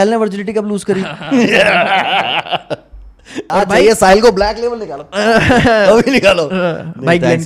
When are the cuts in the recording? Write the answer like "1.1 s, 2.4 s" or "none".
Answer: 3.5 s